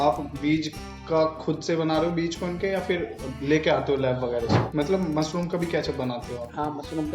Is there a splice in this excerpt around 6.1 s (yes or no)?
no